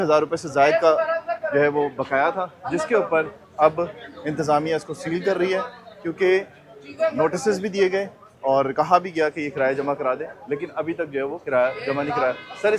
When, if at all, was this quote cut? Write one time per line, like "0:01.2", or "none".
none